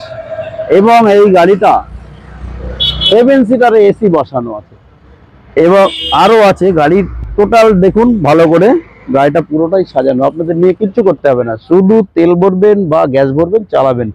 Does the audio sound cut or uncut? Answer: uncut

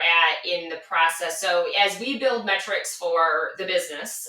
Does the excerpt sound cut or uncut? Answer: cut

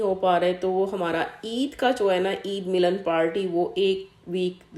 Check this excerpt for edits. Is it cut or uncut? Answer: uncut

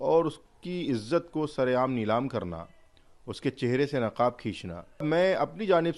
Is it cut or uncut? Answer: cut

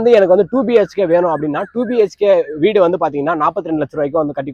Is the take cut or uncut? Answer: uncut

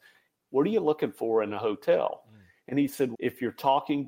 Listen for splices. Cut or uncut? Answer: cut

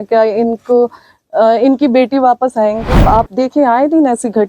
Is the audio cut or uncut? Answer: cut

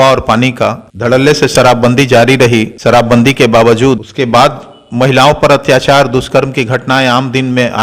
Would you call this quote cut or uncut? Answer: cut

